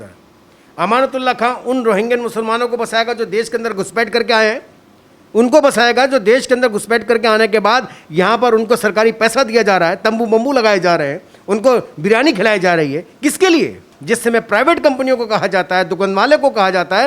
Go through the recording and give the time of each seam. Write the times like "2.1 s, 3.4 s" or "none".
13.9 s